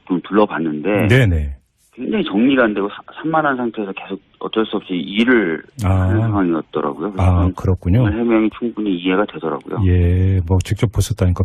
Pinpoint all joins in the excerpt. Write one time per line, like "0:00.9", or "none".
none